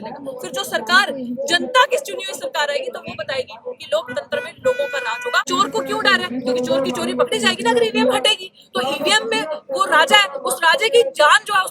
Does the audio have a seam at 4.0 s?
no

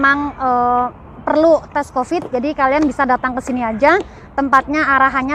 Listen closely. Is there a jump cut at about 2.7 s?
no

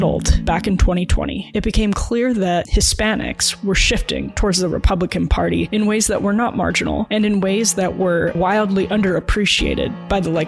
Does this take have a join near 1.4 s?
no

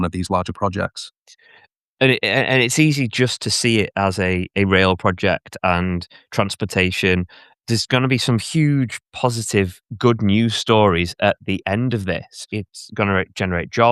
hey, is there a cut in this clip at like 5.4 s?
no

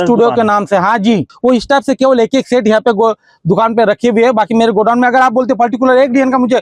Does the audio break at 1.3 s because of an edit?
yes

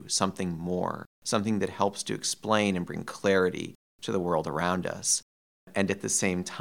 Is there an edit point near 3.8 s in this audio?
no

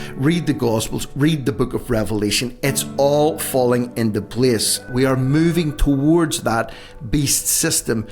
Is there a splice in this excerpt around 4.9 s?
yes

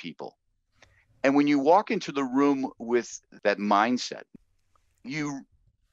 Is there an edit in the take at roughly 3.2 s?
yes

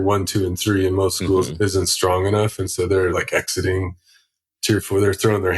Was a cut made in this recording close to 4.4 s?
no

